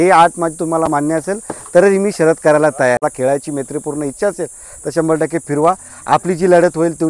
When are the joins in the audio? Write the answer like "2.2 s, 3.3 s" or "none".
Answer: 3.0 s